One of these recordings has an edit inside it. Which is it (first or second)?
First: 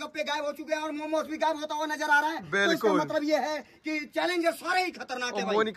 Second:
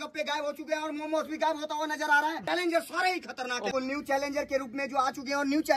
second